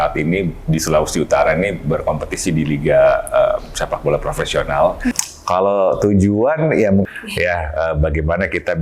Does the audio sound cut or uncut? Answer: cut